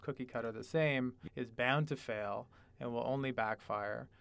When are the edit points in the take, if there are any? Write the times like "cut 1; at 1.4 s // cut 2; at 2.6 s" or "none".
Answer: cut 1; at 1.2 s